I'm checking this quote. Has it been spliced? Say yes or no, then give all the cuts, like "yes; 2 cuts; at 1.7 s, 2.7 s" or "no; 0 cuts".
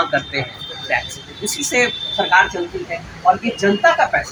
no; 0 cuts